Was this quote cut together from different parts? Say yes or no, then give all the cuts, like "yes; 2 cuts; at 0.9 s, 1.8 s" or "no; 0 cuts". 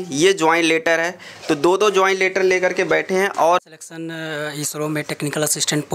yes; 1 cut; at 3.6 s